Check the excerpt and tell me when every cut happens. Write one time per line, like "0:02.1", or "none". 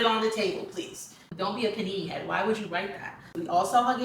0:01.2
0:03.3

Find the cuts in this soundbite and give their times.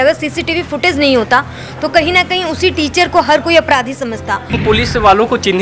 0:04.6

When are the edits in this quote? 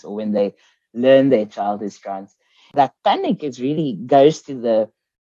0:02.7

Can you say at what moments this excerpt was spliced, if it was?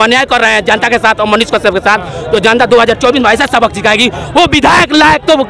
none

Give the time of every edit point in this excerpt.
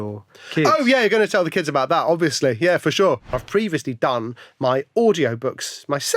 0:03.3

